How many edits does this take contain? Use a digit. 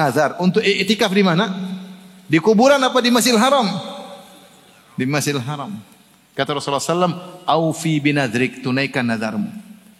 0